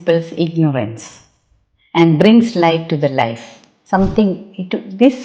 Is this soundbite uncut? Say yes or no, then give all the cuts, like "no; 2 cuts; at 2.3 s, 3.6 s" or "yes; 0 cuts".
no; 1 cut; at 3.7 s